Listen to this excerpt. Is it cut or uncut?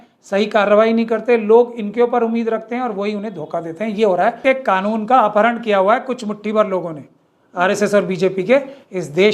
cut